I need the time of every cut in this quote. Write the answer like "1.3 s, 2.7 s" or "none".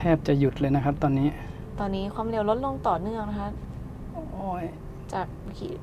none